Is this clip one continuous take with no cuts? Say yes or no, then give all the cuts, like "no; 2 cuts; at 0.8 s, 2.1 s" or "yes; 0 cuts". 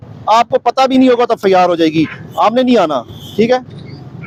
yes; 0 cuts